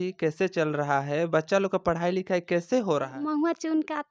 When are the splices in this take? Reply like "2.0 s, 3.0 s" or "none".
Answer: 3.1 s